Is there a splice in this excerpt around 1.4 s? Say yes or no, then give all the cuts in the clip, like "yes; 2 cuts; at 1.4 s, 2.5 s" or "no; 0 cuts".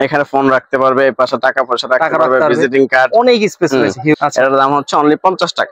no; 1 cut; at 4.1 s